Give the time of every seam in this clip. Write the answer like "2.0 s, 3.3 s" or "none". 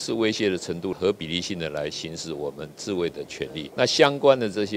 0.9 s